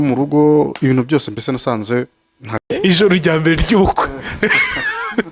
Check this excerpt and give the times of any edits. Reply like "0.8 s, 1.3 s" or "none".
2.7 s